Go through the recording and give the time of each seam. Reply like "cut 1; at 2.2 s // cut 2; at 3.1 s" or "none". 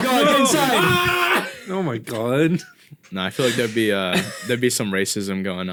none